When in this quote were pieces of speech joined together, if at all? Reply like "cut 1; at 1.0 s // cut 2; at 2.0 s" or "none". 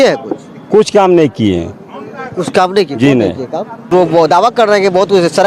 cut 1; at 3.9 s

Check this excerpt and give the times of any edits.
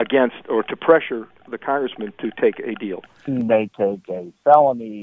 cut 1; at 3.1 s

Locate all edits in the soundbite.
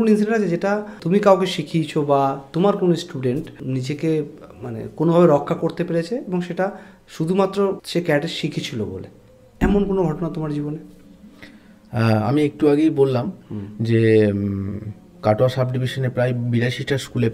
cut 1; at 0.9 s // cut 2; at 3.5 s // cut 3; at 7.8 s

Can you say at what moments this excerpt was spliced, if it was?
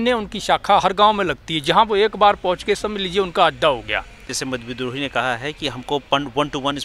cut 1; at 4.3 s

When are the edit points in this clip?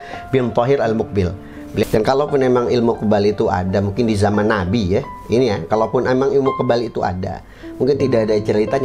cut 1; at 1.8 s

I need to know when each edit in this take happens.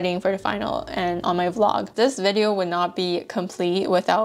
cut 1; at 1.9 s

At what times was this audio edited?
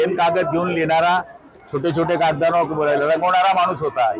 none

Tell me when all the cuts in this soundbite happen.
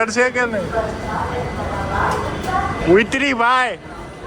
cut 1; at 2.8 s

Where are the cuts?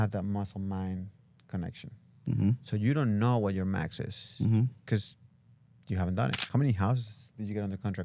cut 1; at 6.4 s

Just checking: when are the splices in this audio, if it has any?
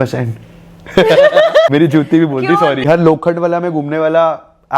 cut 1; at 1.7 s // cut 2; at 2.9 s

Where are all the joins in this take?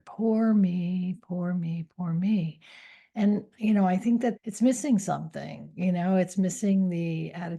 cut 1; at 4.4 s

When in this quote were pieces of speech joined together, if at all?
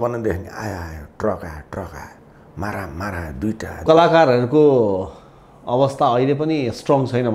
cut 1; at 3.8 s

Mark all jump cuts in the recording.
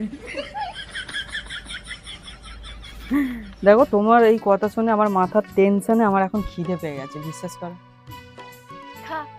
none

